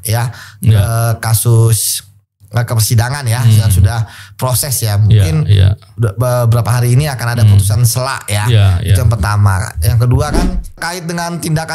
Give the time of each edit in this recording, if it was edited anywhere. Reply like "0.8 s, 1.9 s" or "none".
10.7 s